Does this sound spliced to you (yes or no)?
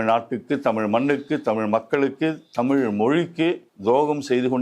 yes